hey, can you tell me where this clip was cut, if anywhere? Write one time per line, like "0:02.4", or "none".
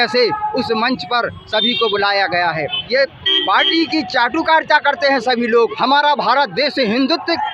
0:02.8
0:05.7